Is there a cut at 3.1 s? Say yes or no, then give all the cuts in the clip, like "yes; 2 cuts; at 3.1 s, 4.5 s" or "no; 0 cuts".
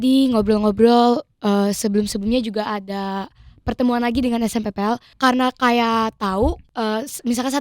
no; 2 cuts; at 5.1 s, 6.6 s